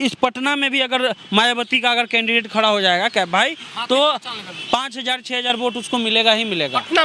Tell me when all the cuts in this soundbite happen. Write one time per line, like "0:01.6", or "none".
none